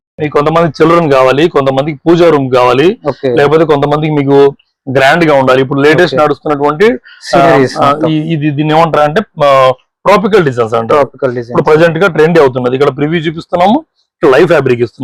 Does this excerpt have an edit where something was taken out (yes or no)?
no